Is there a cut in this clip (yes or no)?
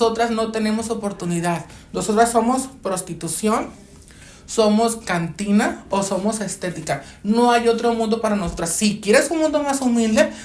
no